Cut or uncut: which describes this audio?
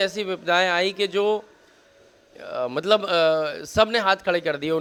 uncut